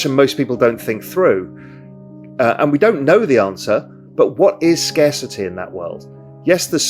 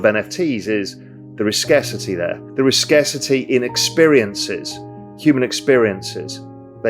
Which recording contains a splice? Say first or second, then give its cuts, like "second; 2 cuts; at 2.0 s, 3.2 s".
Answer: second; 1 cut; at 2.4 s